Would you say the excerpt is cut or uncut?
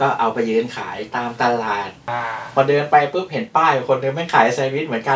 cut